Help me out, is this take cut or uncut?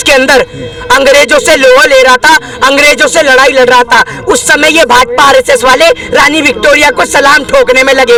uncut